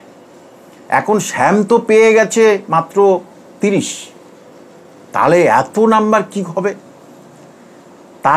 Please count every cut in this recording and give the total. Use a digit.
0